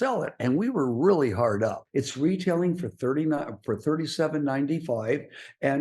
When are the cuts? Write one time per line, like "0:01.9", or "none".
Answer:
0:01.8